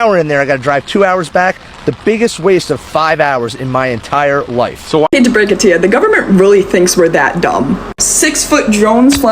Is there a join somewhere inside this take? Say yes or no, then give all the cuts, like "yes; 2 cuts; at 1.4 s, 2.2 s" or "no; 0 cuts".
yes; 1 cut; at 5.1 s